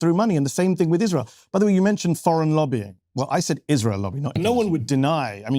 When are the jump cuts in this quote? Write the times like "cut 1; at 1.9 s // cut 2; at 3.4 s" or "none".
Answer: cut 1; at 4.4 s